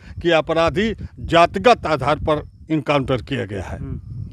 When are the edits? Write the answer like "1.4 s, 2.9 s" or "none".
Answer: none